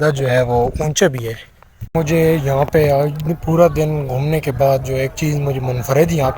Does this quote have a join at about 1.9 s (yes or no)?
yes